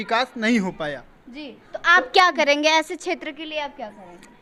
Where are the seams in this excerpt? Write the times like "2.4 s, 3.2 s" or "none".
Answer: none